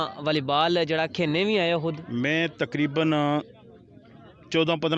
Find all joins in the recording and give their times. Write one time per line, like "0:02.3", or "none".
0:02.0